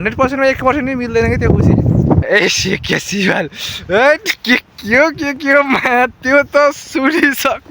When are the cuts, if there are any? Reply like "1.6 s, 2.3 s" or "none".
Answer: 2.2 s, 3.8 s